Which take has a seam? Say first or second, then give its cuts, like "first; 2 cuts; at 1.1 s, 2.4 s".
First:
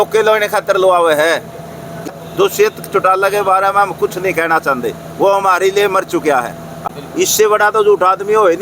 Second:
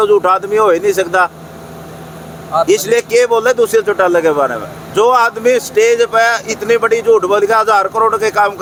first; 2 cuts; at 2.1 s, 6.9 s